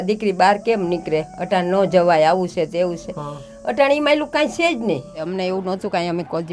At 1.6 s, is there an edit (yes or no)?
no